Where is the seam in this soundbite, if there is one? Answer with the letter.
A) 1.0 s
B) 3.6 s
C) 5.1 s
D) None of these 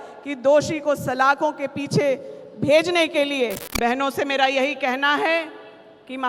B